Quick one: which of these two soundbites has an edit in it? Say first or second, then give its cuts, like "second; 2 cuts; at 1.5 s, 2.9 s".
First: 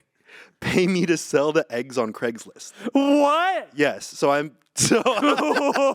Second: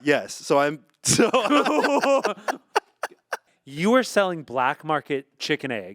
second; 1 cut; at 3.4 s